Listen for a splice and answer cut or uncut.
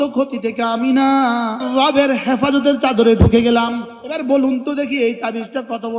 cut